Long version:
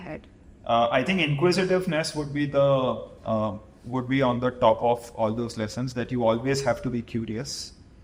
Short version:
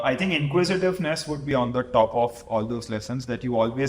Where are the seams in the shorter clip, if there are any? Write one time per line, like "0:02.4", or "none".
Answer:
0:01.5